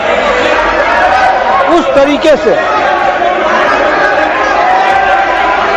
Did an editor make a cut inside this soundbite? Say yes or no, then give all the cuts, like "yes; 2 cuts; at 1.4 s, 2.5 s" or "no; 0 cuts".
no; 0 cuts